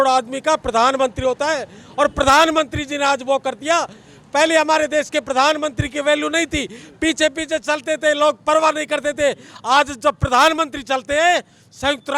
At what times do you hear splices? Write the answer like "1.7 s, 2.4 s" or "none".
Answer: none